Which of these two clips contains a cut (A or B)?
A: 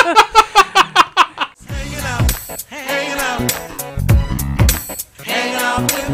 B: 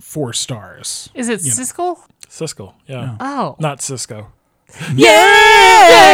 A